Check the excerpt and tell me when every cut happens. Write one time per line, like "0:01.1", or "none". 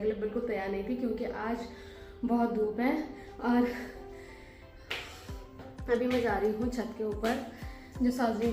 none